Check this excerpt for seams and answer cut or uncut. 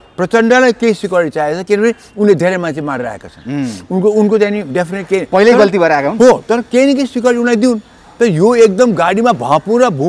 uncut